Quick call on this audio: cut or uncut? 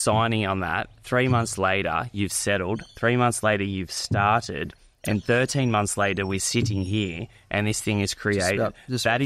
uncut